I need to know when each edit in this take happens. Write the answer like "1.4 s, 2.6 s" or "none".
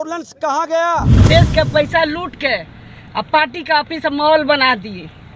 1.2 s

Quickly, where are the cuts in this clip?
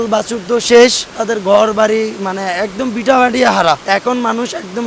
1.2 s, 3.8 s

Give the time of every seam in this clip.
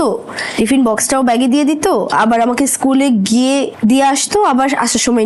3.7 s

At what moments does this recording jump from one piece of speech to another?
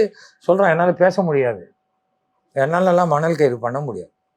none

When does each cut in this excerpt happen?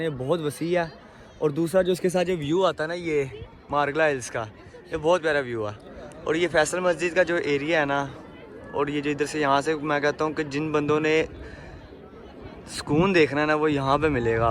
none

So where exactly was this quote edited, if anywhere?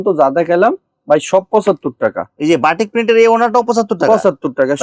none

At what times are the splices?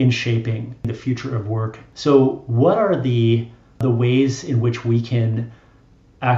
0.9 s, 1.9 s, 3.8 s

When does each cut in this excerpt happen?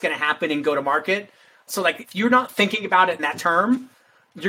1.6 s, 3.3 s

